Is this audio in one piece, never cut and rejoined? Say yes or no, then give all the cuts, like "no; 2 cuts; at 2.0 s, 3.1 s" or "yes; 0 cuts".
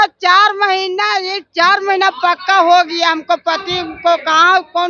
yes; 0 cuts